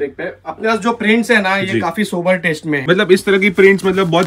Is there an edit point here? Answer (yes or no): yes